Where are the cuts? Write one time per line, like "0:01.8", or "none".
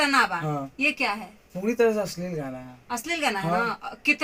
none